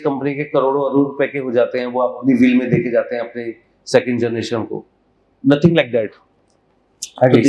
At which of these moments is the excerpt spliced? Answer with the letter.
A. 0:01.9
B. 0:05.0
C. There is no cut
C